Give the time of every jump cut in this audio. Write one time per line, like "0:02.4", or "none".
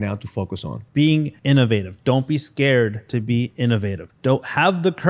0:01.3
0:03.0
0:04.1